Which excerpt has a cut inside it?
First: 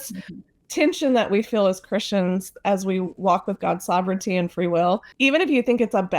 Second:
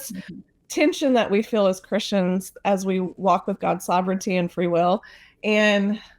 first; 1 cut; at 5.1 s

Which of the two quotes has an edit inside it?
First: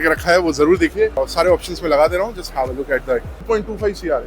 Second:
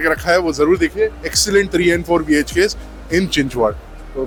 first; 2 cuts; at 1.2 s, 3.3 s

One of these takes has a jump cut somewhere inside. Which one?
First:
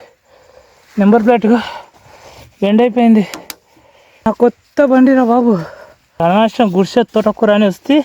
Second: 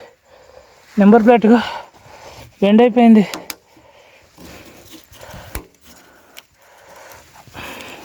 first; 2 cuts; at 4.3 s, 6.2 s

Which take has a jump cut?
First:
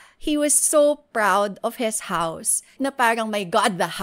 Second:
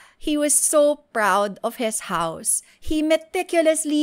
first; 1 cut; at 2.8 s

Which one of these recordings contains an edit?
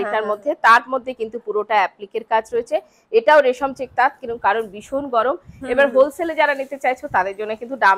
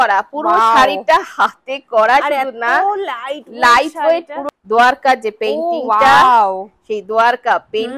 second; 1 cut; at 4.4 s

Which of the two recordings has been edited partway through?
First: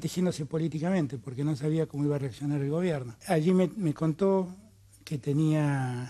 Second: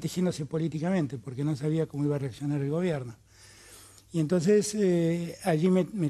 first; 1 cut; at 3.2 s

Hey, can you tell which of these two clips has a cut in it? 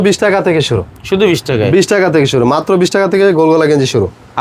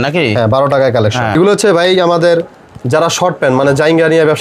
second; 1 cut; at 1.3 s

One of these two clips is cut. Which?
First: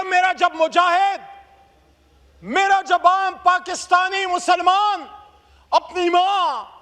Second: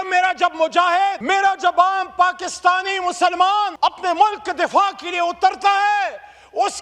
second; 2 cuts; at 1.2 s, 3.7 s

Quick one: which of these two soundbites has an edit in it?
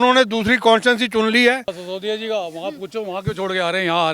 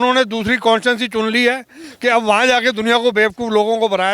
first; 1 cut; at 1.8 s

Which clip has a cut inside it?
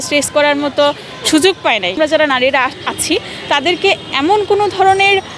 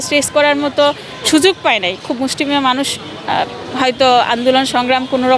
first; 1 cut; at 2.0 s

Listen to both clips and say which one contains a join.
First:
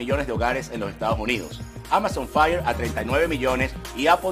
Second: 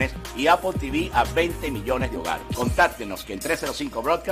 second; 1 cut; at 2.6 s

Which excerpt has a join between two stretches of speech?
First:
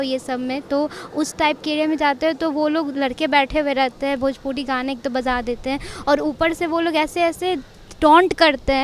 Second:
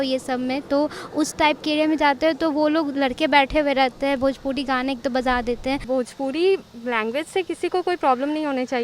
second; 1 cut; at 5.8 s

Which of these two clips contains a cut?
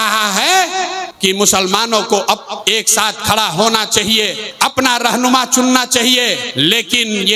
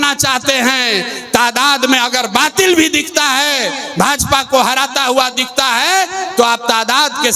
first; 4 cuts; at 1.1 s, 2.6 s, 4.4 s, 6.4 s

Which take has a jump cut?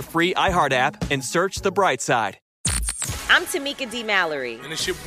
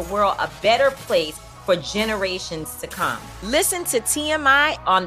first; 1 cut; at 2.4 s

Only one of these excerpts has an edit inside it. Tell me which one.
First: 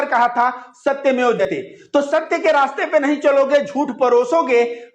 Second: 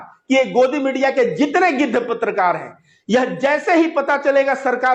first; 1 cut; at 1.4 s

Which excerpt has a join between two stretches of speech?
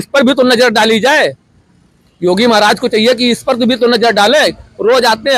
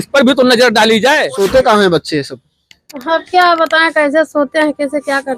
second; 1 cut; at 1.3 s

